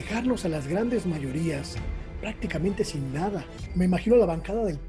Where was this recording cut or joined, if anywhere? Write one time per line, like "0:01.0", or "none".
0:03.6